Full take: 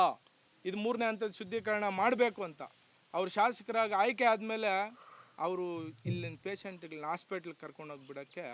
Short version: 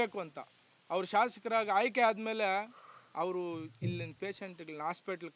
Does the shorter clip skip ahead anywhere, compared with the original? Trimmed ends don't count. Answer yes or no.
no